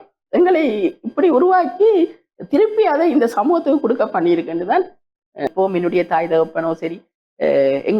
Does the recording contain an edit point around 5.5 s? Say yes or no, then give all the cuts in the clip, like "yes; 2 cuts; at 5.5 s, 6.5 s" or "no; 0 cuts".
yes; 1 cut; at 5.5 s